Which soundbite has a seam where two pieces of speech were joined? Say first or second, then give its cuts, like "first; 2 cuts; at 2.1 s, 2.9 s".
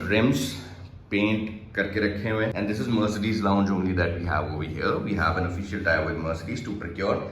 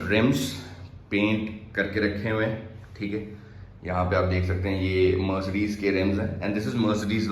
first; 1 cut; at 2.5 s